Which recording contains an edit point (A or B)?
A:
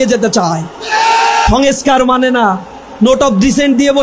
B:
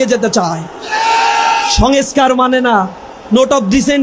A